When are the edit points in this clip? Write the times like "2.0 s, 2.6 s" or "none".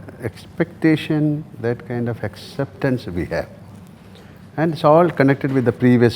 none